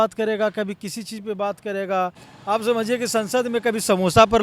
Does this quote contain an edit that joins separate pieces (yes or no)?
yes